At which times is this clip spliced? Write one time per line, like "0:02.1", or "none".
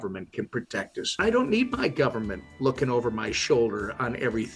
0:01.2